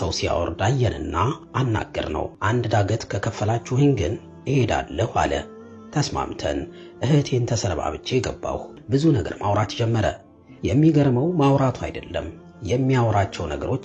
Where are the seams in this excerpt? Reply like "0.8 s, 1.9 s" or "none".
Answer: 2.3 s, 8.8 s